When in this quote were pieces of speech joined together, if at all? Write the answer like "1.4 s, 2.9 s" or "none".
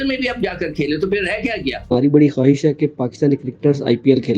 1.8 s